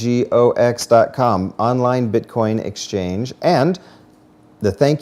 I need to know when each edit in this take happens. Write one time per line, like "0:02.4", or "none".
none